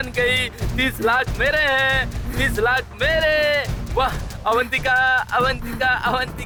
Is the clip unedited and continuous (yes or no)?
yes